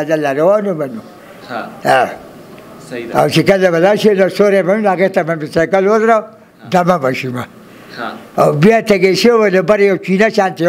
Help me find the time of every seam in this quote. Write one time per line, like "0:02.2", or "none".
none